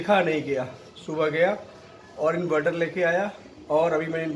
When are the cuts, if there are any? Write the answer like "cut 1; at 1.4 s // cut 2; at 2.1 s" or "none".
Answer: none